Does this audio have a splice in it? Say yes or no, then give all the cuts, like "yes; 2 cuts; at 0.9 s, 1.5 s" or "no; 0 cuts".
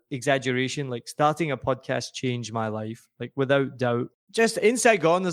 yes; 1 cut; at 4.2 s